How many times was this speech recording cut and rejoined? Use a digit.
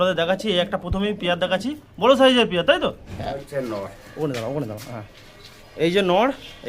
1